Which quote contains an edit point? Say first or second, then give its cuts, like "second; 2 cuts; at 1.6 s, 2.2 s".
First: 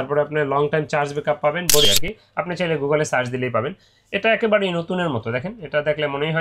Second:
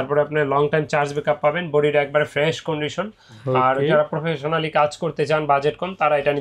first; 1 cut; at 1.8 s